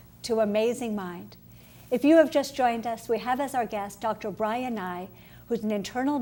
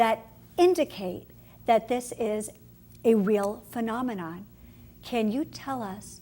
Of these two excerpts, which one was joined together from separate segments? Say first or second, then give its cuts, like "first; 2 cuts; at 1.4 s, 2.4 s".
second; 1 cut; at 4.4 s